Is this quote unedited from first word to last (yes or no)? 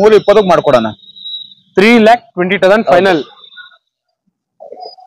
yes